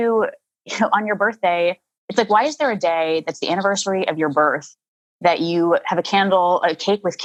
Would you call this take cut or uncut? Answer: uncut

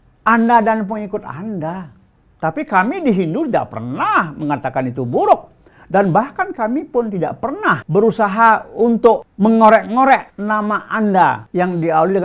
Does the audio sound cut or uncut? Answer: cut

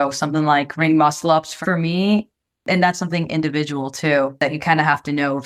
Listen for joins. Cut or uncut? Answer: cut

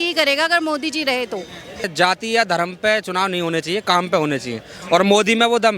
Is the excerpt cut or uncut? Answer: cut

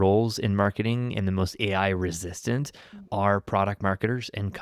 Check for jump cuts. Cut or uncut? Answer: uncut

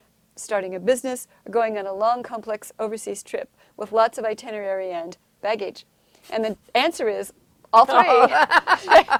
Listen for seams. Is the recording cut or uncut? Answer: uncut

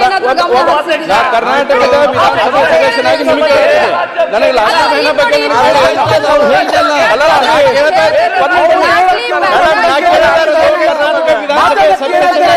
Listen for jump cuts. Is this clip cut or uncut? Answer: uncut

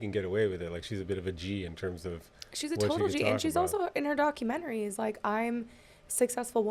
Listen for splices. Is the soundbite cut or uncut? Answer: uncut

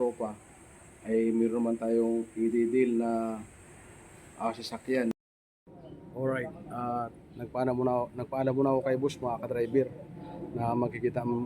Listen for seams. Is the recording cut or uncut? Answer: cut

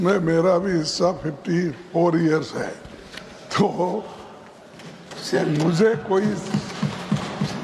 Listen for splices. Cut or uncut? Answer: uncut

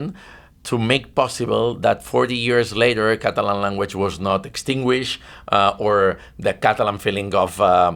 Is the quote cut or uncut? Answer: uncut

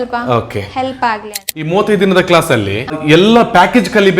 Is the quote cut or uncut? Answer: cut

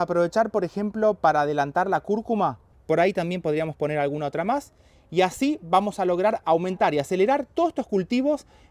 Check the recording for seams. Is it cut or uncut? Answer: cut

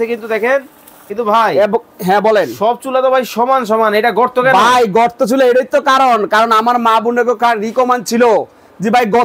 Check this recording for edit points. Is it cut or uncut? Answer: cut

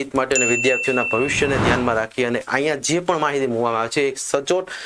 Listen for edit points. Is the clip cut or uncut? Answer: uncut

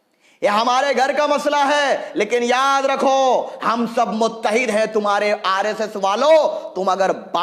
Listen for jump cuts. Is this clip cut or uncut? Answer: uncut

